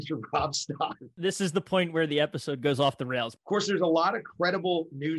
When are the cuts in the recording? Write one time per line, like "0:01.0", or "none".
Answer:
0:01.0
0:03.3